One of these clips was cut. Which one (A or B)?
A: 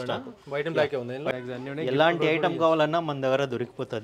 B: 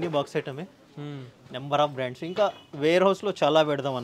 A